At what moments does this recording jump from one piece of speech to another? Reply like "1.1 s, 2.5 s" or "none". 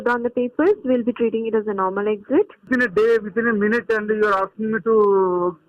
2.7 s